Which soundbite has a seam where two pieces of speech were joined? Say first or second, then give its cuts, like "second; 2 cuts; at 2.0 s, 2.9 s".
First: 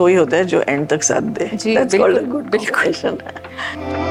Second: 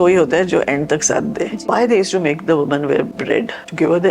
second; 2 cuts; at 1.7 s, 3.2 s